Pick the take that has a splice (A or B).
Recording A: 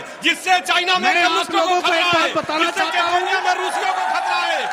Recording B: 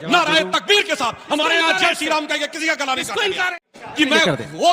B